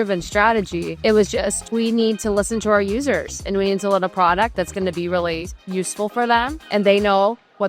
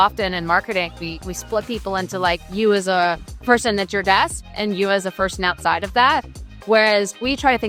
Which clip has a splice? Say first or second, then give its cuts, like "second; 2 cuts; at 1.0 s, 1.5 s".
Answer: first; 3 cuts; at 0.9 s, 1.6 s, 6.6 s